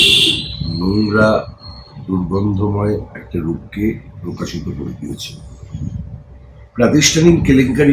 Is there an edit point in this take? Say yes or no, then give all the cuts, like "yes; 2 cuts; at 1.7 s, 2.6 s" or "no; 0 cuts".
no; 0 cuts